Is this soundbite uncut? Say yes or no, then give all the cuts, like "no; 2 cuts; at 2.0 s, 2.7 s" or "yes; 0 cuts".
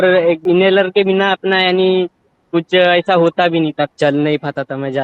no; 1 cut; at 3.9 s